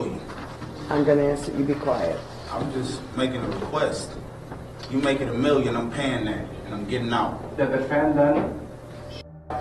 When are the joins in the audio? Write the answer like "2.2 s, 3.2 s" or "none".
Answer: 7.4 s